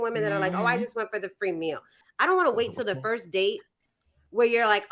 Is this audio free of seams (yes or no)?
no